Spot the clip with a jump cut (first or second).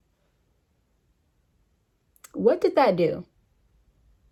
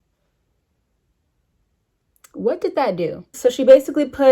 second